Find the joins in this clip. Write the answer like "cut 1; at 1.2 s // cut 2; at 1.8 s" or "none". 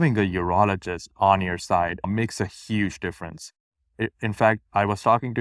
none